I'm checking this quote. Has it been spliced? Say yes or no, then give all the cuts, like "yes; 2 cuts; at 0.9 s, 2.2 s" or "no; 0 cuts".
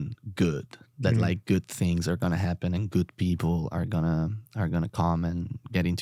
no; 0 cuts